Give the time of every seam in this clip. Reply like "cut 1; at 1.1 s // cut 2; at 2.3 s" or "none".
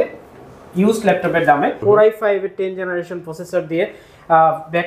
cut 1; at 1.8 s